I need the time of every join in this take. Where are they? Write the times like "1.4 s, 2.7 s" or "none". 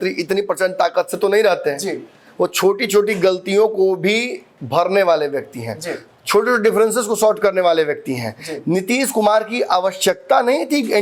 none